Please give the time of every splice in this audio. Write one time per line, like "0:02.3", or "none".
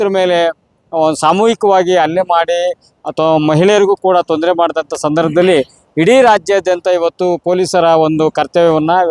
none